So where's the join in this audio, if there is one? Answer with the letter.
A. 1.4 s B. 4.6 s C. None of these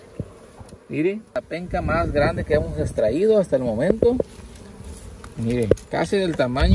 A